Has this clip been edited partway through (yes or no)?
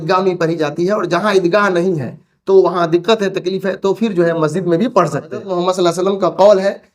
yes